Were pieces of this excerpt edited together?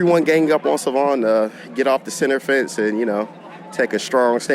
no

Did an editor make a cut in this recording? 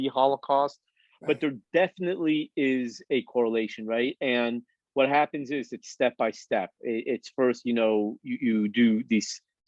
no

